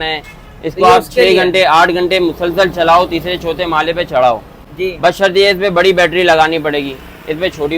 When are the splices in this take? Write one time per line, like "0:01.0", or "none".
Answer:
none